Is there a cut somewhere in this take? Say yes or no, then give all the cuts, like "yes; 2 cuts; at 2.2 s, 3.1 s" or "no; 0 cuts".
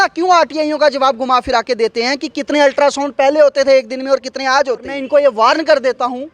yes; 1 cut; at 5.0 s